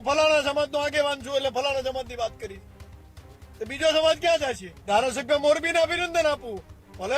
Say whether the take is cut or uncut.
cut